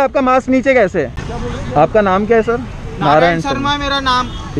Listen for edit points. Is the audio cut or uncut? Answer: cut